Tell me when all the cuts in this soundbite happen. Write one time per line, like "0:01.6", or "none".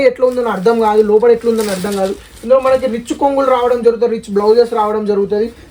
none